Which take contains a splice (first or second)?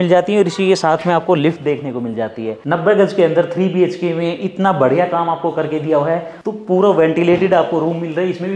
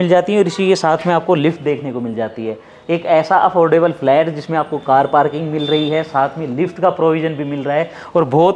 first